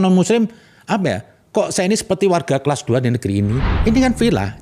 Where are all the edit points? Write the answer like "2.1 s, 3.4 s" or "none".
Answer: 3.7 s